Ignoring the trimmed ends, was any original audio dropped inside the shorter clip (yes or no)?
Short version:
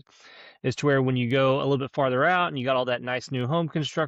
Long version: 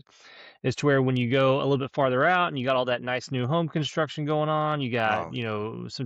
no